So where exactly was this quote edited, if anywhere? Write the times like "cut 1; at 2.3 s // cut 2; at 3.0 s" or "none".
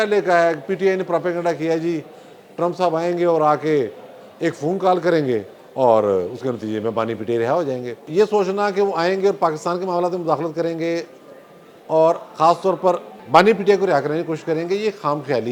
cut 1; at 8.0 s // cut 2; at 13.1 s